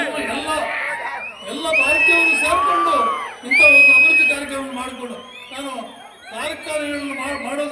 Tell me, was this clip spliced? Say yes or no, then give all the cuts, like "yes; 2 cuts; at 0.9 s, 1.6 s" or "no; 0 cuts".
no; 0 cuts